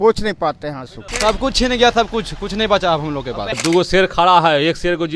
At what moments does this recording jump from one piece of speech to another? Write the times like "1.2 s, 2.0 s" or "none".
1.1 s, 3.6 s